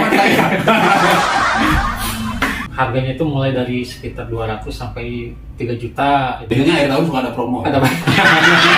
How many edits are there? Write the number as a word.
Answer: two